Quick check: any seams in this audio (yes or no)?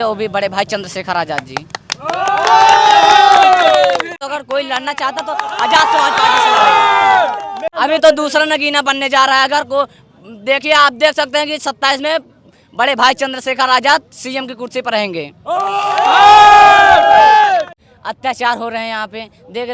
yes